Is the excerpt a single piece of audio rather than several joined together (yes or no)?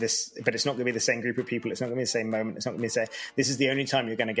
yes